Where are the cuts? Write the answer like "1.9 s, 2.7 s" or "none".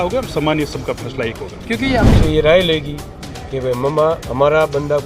2.1 s